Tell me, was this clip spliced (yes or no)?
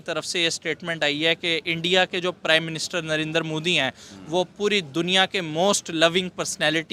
no